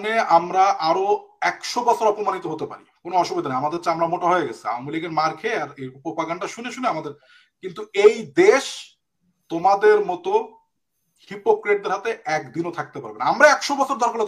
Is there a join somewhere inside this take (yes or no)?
no